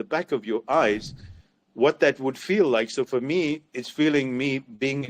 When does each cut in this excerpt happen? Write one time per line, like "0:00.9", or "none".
none